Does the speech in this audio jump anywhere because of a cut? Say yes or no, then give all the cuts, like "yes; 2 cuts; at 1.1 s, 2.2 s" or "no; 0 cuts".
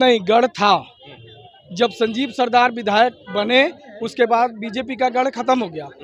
no; 0 cuts